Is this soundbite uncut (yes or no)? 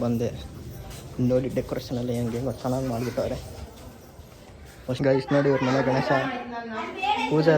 no